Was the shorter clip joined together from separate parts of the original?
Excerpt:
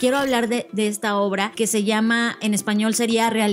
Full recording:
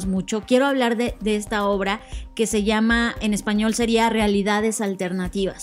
yes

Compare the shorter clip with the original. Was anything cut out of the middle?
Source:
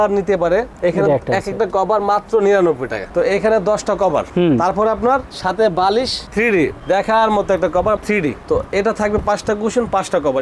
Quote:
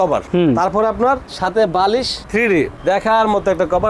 no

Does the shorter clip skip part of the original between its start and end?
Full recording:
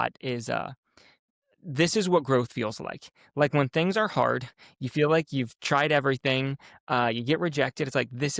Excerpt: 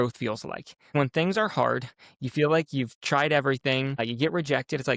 yes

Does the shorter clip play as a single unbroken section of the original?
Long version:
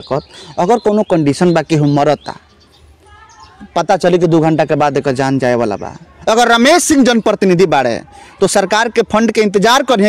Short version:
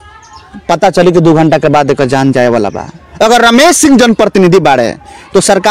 yes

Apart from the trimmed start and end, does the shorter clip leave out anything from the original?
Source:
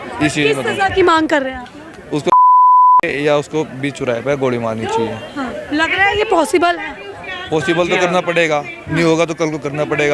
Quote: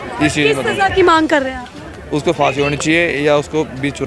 no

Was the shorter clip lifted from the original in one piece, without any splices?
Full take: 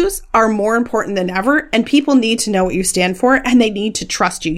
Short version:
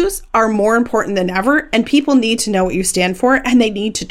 yes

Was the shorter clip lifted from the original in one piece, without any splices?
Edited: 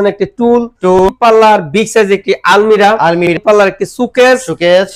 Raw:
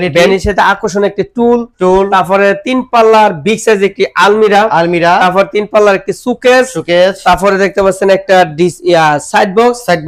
no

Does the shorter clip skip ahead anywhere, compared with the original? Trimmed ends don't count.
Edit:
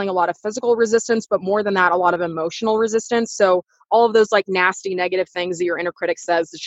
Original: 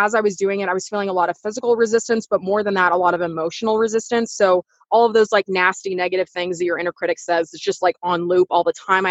no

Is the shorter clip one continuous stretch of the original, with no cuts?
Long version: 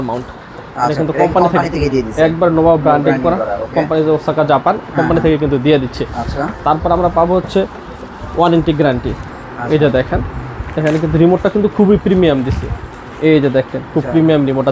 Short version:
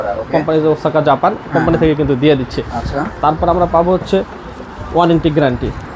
yes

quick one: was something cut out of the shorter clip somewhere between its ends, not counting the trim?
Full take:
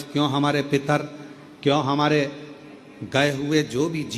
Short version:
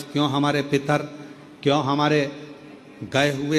no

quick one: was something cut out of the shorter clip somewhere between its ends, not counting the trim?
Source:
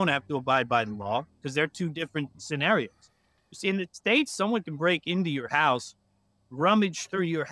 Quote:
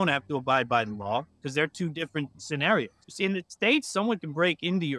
yes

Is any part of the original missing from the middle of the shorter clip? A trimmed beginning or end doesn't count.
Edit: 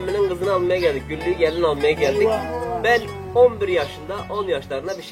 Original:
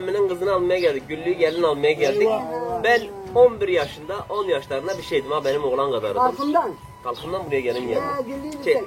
no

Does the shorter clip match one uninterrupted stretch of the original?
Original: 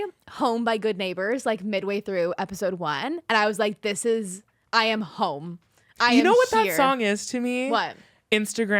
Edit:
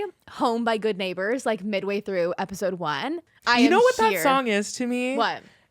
no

